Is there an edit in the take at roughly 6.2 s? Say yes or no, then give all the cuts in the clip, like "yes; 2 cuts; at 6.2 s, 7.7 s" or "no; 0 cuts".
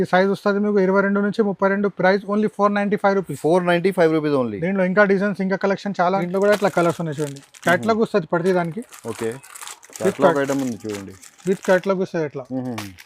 yes; 1 cut; at 6.2 s